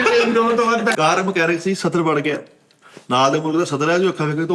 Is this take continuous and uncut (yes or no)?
no